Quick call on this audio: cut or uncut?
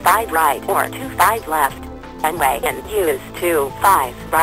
cut